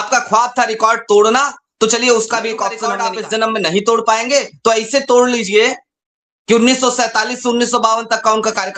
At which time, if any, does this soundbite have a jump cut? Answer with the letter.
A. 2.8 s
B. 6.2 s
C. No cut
A